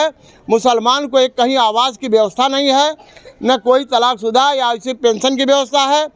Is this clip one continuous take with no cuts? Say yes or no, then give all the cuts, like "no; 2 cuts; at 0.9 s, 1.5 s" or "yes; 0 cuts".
yes; 0 cuts